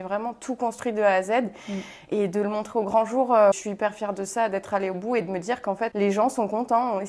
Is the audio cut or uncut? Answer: cut